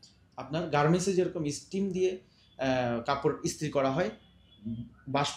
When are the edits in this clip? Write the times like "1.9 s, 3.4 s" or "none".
none